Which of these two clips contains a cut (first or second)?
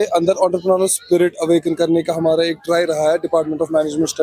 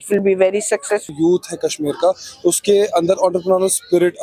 second